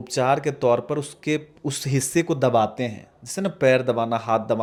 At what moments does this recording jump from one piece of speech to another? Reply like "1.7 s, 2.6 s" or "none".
none